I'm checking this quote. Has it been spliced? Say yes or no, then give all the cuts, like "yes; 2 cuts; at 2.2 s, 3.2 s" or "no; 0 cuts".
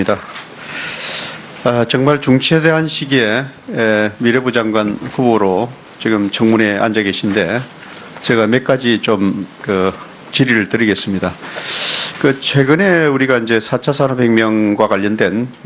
no; 0 cuts